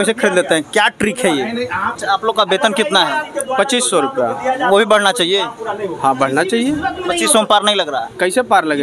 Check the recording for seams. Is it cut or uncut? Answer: cut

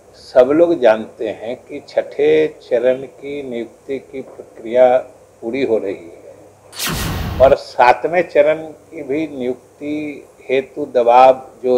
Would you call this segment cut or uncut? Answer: uncut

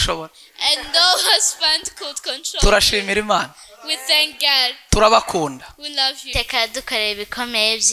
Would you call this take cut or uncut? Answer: cut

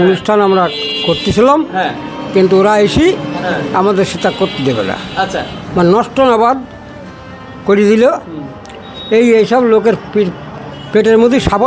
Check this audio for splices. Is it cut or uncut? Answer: uncut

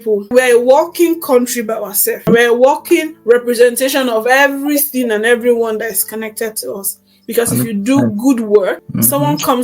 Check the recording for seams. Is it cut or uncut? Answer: cut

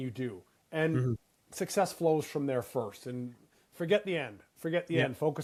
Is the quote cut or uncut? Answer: uncut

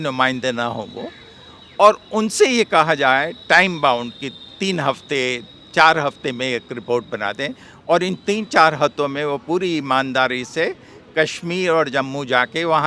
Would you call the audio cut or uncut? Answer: uncut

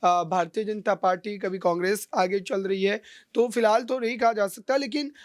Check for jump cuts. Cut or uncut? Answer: uncut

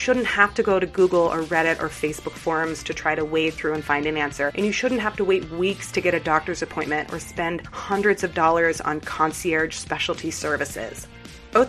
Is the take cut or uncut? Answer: uncut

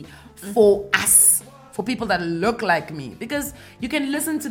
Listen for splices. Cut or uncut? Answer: uncut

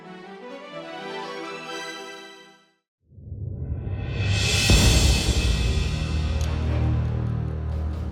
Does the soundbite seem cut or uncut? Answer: cut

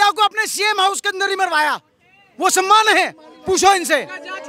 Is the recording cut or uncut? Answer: uncut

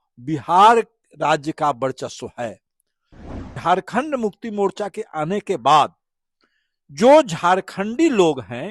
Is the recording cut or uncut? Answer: cut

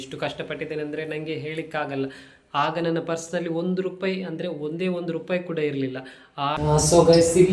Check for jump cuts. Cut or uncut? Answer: cut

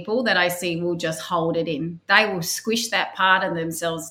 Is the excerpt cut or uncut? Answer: uncut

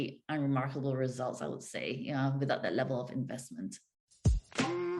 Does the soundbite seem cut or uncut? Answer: cut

